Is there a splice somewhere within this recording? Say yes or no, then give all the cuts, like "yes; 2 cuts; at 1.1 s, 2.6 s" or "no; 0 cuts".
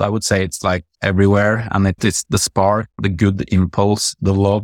yes; 3 cuts; at 0.9 s, 2.1 s, 3.0 s